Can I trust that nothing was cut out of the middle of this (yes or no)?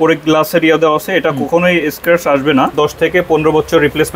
no